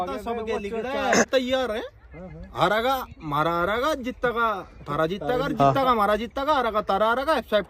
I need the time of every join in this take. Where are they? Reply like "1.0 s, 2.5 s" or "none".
1.3 s